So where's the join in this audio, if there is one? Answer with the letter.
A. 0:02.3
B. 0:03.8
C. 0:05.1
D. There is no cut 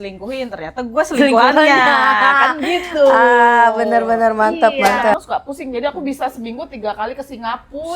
C